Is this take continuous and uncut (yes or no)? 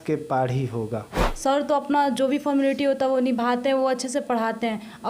no